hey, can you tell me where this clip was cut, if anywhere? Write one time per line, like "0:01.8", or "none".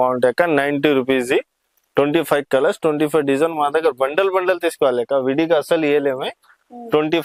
none